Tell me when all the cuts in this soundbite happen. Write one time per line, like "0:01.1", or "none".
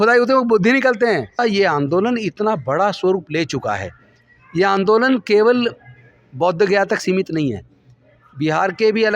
0:01.4